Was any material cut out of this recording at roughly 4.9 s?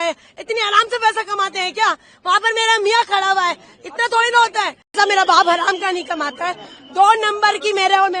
yes; 1 cut; at 4.9 s

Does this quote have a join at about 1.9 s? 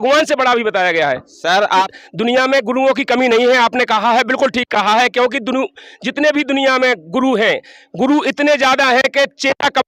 yes; 1 cut; at 1.9 s

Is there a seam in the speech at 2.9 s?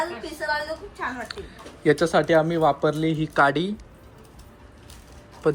no; 0 cuts

